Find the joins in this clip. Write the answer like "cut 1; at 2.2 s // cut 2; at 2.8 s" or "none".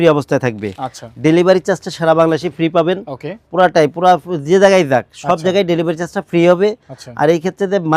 none